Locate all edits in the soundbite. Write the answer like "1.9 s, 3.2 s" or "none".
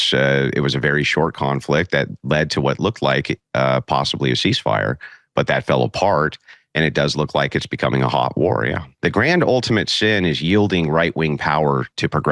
8.9 s